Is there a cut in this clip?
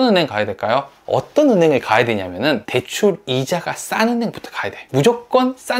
yes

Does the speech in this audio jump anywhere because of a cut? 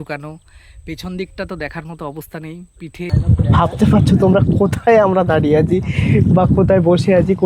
yes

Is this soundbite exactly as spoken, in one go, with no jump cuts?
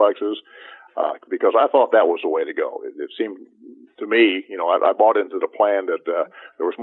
yes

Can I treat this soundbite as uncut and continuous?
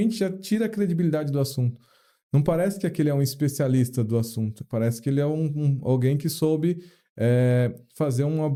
yes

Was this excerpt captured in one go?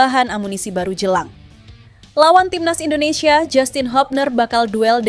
yes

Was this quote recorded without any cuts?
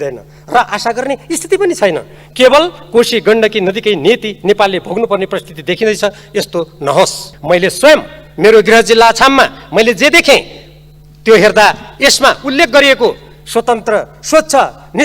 no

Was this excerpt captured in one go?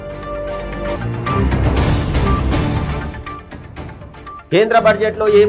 no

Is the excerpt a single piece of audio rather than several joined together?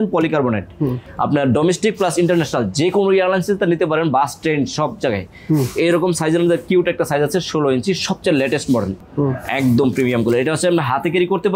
no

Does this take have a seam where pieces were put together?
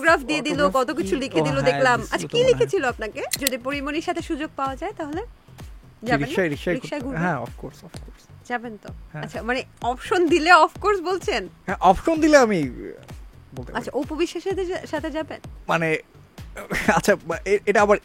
yes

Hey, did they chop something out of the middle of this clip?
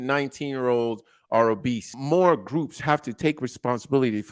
yes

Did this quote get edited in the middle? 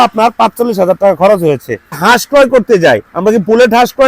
yes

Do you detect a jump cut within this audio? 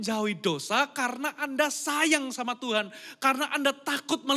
no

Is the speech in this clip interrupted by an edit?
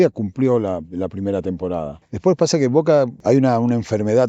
yes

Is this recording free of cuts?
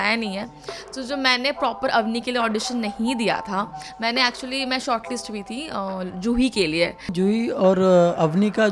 no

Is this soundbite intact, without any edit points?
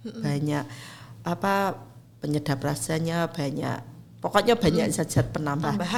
yes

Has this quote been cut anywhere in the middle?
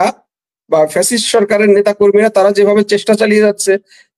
no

